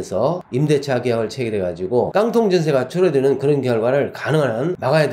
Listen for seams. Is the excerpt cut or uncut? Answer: uncut